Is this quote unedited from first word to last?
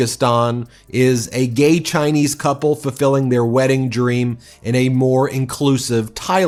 yes; 0 cuts

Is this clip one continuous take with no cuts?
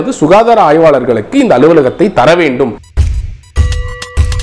no; 1 cut; at 2.8 s

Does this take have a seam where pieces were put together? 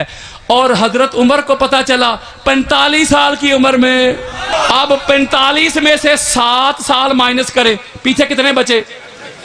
yes; 1 cut; at 4.5 s

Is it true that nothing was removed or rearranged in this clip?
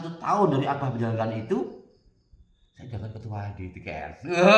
yes; 0 cuts

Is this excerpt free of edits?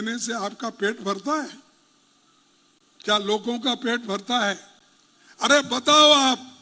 yes; 0 cuts

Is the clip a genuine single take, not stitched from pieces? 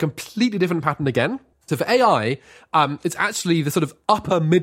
yes; 0 cuts

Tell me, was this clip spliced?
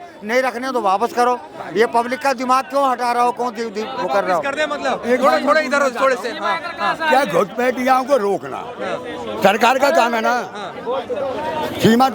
no; 0 cuts

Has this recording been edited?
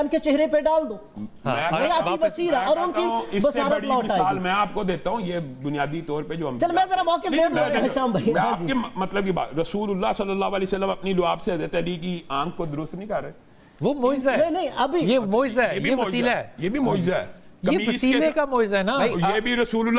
no; 0 cuts

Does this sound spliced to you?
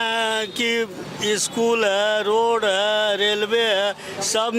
no; 0 cuts

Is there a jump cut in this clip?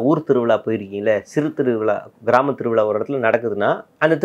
no; 0 cuts

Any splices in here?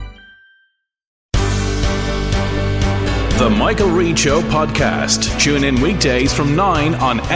yes; 1 cut; at 1.2 s

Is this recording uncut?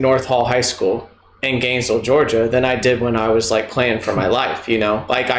yes; 0 cuts

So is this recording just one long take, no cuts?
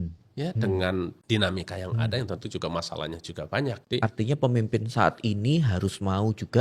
no; 2 cuts; at 1.2 s, 3.8 s

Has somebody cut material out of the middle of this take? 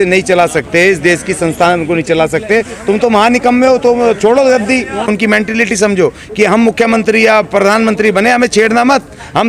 yes; 1 cut; at 5.1 s

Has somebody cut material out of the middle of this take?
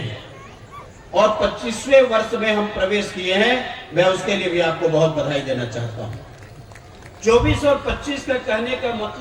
no; 0 cuts

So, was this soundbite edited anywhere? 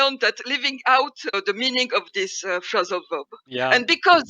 yes; 2 cuts; at 1.4 s, 3.4 s

